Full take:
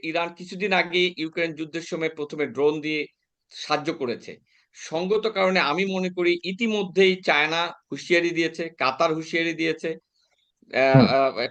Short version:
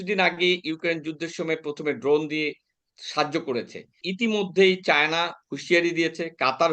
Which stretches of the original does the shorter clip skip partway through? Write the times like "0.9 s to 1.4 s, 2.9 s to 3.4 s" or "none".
4.6 s to 6.5 s